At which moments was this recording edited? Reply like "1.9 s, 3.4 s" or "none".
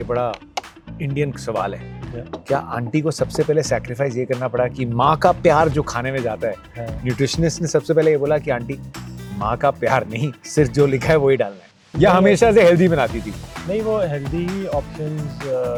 none